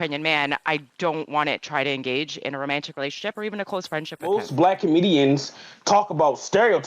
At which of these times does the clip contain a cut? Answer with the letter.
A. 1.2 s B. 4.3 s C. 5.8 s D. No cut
B